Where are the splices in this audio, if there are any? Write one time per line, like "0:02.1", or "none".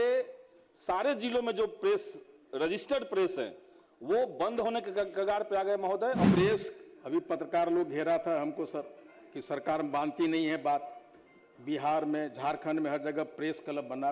0:06.2